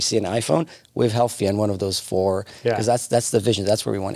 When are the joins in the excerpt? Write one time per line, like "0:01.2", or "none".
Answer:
none

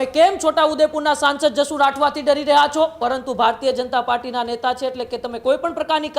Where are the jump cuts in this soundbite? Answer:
0:03.0

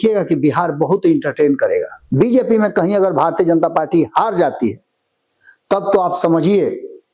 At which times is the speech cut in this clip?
0:02.0

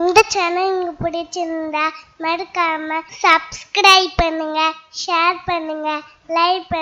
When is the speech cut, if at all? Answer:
0:03.1

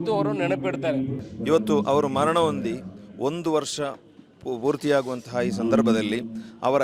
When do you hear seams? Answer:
0:01.2

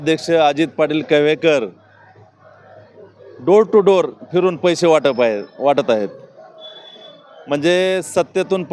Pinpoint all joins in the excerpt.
none

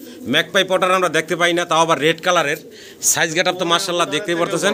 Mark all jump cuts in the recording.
none

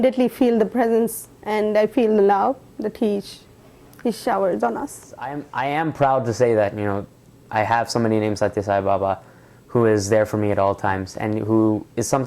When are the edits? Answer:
0:05.4

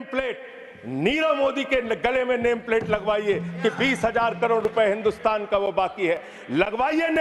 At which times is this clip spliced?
none

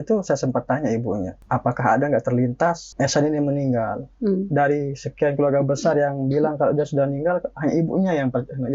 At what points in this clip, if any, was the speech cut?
0:01.4
0:02.9

